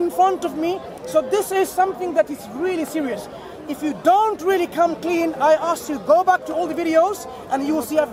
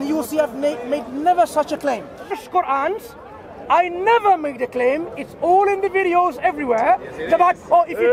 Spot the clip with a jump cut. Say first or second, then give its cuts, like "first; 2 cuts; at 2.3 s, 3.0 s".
second; 1 cut; at 2.3 s